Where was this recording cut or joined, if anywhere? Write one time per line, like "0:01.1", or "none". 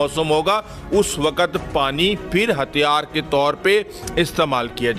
none